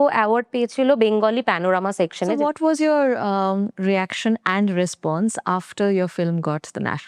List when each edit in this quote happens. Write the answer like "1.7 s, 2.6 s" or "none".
2.4 s